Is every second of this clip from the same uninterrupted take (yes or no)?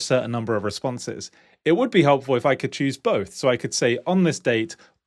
yes